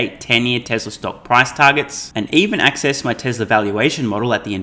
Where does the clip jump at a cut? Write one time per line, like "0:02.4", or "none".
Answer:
none

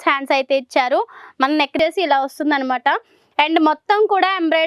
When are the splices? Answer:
0:01.8

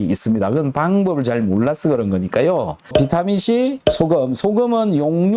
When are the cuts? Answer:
0:02.8

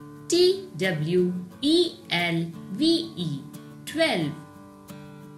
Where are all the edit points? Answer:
0:04.4

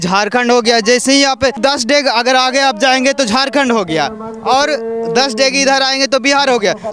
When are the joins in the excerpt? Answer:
0:01.6

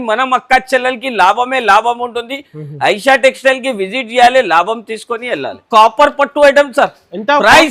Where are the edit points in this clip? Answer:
0:05.6

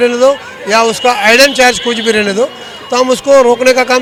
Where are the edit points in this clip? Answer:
none

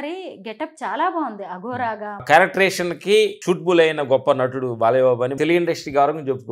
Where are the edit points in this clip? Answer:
0:02.2
0:05.4

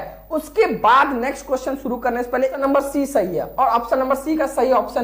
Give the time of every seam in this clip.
0:02.6

